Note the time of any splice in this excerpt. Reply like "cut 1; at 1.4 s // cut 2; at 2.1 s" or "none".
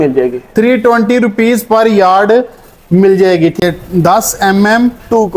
cut 1; at 3.6 s